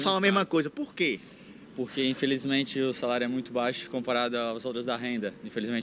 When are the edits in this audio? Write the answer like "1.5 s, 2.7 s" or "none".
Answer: none